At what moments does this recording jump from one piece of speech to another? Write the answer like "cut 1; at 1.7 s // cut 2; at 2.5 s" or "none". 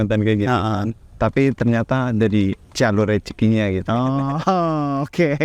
none